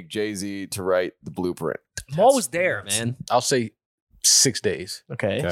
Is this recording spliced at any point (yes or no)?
yes